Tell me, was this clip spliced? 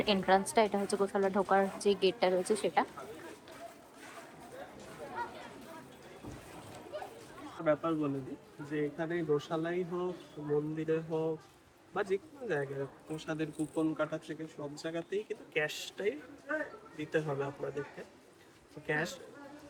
no; 0 cuts

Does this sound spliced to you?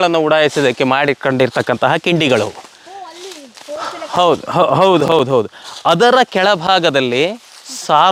no; 0 cuts

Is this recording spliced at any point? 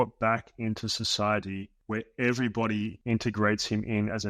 yes; 2 cuts; at 1.7 s, 3.0 s

